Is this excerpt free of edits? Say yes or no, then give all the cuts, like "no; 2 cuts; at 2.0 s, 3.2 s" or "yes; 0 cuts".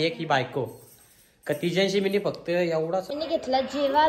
no; 1 cut; at 3.0 s